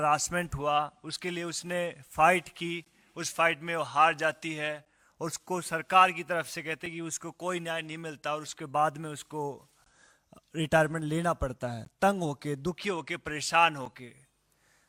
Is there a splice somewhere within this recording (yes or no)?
no